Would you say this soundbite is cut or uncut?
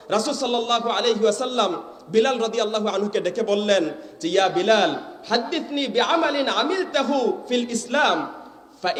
uncut